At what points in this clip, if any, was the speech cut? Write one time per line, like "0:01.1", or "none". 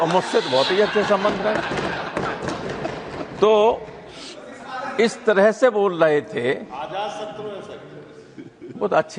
none